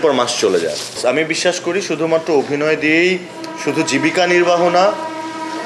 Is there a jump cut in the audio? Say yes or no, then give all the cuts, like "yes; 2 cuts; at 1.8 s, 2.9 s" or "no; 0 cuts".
yes; 1 cut; at 1.0 s